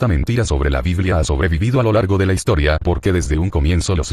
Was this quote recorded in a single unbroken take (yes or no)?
no